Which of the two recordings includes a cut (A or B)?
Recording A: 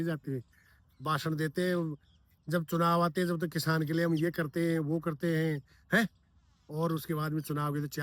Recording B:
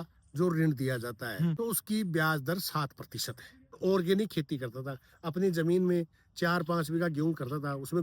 B